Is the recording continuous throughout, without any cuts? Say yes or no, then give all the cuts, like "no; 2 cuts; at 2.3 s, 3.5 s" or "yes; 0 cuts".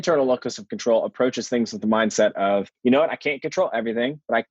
no; 1 cut; at 2.7 s